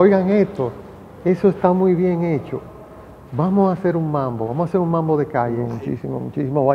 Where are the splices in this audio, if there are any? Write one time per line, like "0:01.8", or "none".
0:05.7